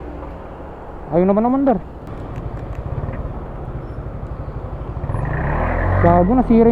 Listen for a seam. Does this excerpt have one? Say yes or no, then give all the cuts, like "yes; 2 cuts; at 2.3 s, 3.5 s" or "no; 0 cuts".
yes; 1 cut; at 2.1 s